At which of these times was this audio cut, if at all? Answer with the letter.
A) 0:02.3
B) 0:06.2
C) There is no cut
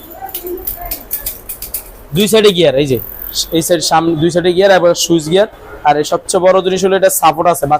C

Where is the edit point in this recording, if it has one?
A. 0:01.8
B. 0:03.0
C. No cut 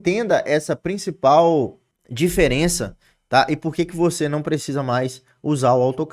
C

